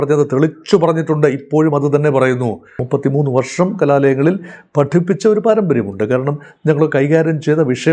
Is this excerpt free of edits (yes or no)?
no